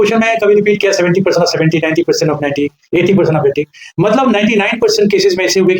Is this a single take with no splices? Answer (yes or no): yes